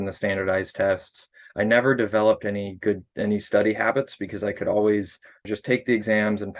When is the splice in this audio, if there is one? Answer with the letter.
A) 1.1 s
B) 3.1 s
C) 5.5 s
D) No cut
C